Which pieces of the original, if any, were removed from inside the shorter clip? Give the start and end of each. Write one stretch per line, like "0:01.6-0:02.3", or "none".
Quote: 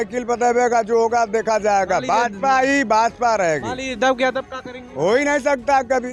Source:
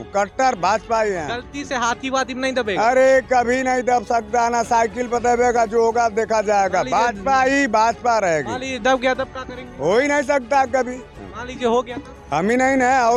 none